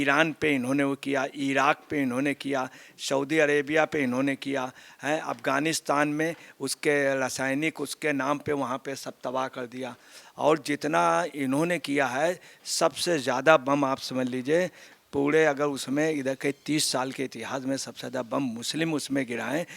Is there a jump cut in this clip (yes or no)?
no